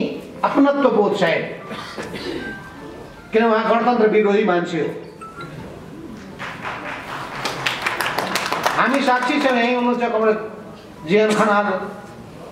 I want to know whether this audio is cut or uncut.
uncut